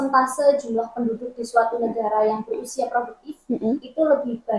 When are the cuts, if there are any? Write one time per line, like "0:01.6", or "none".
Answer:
none